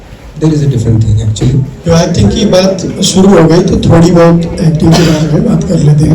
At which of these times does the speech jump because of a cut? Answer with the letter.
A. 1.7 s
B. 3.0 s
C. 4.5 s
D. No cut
A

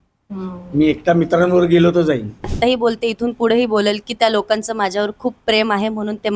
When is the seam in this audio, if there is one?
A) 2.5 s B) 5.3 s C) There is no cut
A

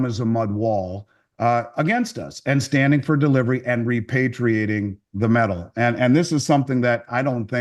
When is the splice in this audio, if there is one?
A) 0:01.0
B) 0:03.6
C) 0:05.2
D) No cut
D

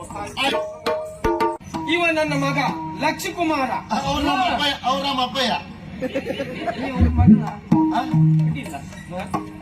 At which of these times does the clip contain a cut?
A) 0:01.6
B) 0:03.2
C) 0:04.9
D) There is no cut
A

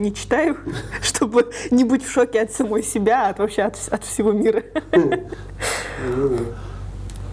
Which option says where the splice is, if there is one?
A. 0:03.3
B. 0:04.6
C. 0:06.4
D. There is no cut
D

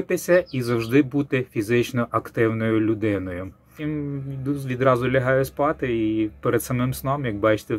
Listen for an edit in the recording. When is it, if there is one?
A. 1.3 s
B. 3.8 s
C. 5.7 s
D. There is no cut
B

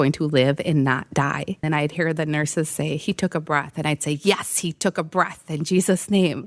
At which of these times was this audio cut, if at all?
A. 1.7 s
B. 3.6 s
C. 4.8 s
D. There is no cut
A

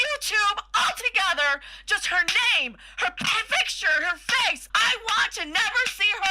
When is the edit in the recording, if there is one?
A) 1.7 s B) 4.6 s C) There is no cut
B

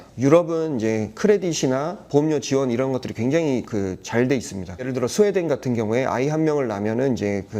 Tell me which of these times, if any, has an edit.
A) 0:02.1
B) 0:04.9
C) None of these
B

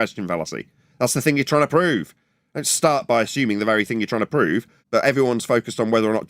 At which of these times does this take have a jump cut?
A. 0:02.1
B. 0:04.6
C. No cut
B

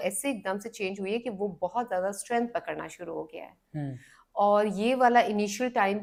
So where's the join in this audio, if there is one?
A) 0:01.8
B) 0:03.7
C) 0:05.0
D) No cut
D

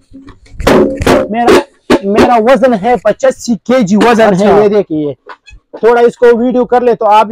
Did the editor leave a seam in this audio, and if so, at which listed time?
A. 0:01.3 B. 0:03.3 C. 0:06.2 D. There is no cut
A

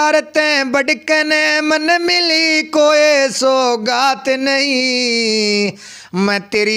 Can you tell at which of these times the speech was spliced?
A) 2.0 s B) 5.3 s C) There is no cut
C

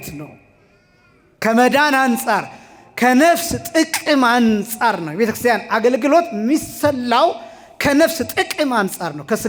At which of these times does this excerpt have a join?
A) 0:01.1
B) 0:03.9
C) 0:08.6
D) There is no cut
D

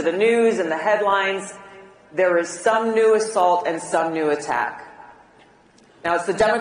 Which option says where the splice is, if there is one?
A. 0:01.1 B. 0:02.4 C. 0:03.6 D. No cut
C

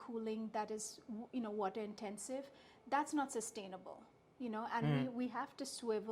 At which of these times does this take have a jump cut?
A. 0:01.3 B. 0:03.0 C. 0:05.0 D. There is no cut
D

